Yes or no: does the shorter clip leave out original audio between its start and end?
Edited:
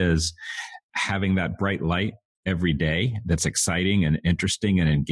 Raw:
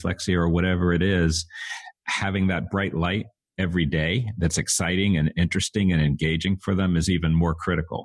no